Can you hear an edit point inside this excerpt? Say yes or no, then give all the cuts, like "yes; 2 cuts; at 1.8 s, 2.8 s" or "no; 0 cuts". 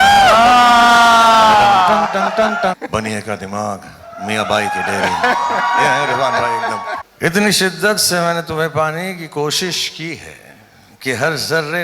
yes; 2 cuts; at 2.8 s, 7.0 s